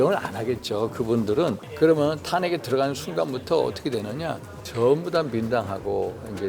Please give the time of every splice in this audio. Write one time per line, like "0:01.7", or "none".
0:01.7
0:04.6